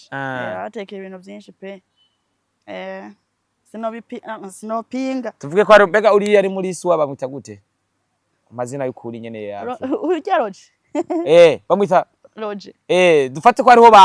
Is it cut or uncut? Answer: uncut